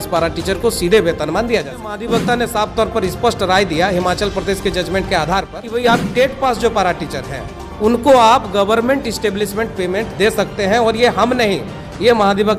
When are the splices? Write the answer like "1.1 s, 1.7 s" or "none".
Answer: 2.0 s, 5.6 s